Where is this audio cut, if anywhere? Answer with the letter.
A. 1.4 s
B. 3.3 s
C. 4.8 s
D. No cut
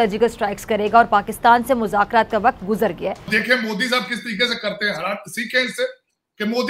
B